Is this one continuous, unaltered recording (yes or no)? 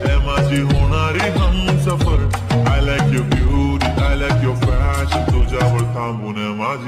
yes